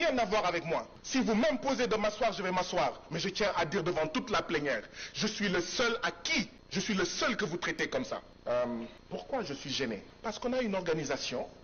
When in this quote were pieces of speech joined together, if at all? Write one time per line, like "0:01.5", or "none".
0:01.0
0:06.6
0:08.3
0:09.0
0:10.1